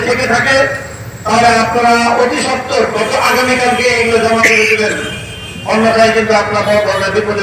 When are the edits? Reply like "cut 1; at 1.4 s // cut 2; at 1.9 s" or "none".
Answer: none